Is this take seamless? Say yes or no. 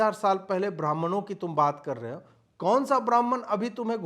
yes